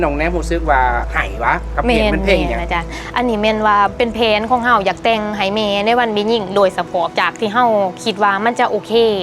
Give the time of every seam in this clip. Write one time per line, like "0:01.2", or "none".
0:01.2
0:03.0
0:07.1